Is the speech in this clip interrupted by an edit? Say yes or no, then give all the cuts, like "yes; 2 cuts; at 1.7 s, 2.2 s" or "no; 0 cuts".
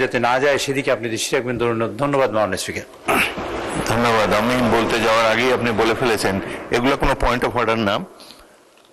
no; 0 cuts